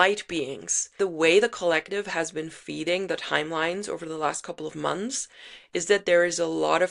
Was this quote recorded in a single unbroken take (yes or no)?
no